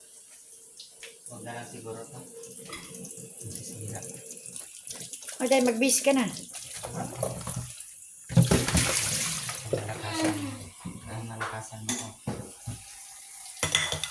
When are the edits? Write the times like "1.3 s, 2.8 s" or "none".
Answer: none